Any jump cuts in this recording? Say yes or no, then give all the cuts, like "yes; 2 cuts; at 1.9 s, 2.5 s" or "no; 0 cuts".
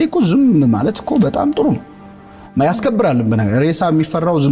no; 0 cuts